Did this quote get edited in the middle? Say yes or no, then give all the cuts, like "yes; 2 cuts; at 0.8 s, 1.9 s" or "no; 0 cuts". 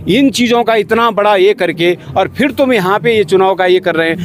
no; 0 cuts